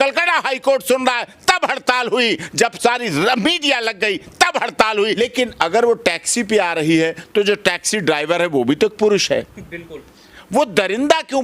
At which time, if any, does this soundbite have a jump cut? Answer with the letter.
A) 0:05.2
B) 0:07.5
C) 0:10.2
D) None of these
A